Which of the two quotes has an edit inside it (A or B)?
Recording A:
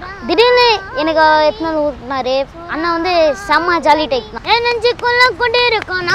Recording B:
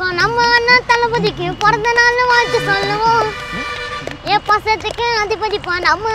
A